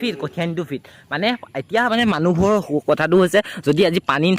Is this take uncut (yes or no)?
yes